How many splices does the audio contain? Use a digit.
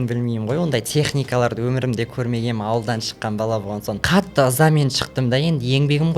1